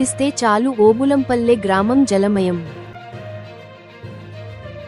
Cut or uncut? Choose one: uncut